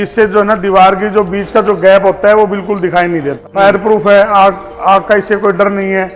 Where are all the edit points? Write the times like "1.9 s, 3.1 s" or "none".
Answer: 3.4 s